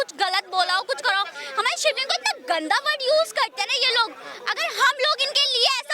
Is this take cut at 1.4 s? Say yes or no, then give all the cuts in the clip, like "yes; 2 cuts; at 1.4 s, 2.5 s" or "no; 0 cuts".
yes; 1 cut; at 1.4 s